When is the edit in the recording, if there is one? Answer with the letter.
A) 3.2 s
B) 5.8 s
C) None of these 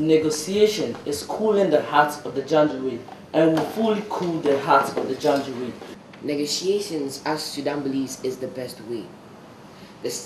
B